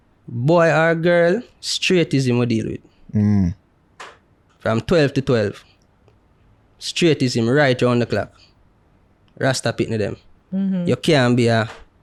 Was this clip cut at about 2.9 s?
no; 0 cuts

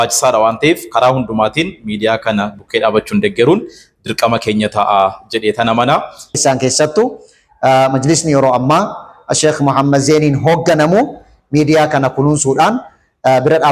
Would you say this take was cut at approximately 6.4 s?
yes; 1 cut; at 6.4 s

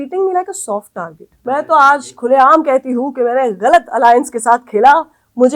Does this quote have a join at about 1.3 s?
yes; 1 cut; at 1.3 s

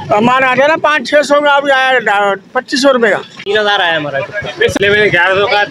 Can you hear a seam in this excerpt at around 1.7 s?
no; 2 cuts; at 3.3 s, 4.8 s

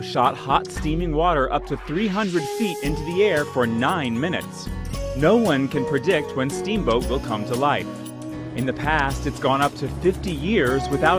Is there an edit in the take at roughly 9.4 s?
yes; 1 cut; at 9.4 s

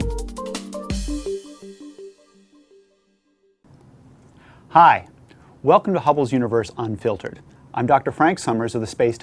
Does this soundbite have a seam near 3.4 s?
yes; 1 cut; at 3.4 s

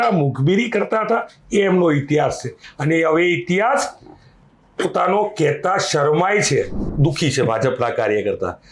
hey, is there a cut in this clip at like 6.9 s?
yes; 1 cut; at 6.9 s

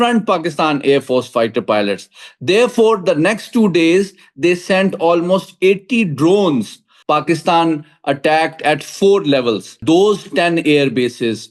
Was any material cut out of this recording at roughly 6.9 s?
yes; 2 cuts; at 6.9 s, 9.8 s

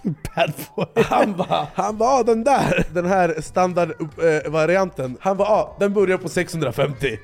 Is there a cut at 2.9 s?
yes; 3 cuts; at 1.7 s, 2.9 s, 5.1 s

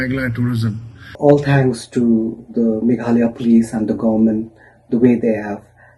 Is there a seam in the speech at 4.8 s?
no; 1 cut; at 1.1 s

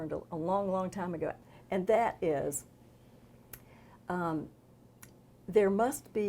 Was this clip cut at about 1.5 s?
yes; 1 cut; at 1.5 s

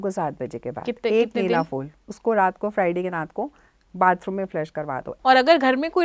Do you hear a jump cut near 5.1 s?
yes; 1 cut; at 5.1 s

